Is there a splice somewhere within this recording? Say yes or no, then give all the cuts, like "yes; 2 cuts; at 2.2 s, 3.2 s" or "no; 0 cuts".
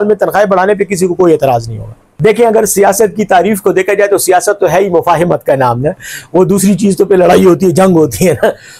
no; 0 cuts